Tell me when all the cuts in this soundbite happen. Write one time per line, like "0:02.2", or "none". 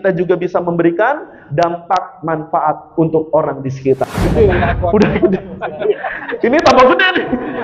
0:04.2